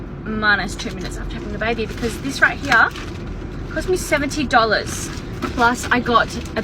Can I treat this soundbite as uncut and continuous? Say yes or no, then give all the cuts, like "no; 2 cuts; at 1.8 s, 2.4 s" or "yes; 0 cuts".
yes; 0 cuts